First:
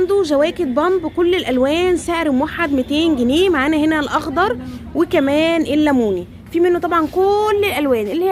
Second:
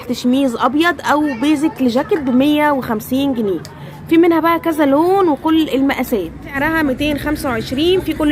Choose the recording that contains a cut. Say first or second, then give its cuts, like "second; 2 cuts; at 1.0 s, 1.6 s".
second; 1 cut; at 6.5 s